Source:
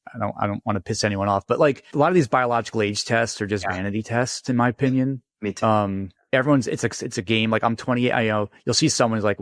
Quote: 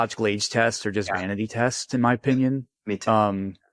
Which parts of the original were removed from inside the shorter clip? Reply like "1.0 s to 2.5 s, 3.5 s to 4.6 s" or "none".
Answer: none